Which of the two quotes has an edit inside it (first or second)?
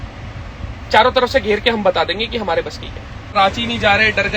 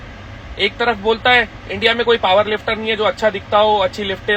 first